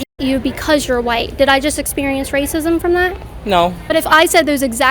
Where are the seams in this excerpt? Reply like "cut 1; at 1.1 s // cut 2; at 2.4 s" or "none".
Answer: cut 1; at 3.9 s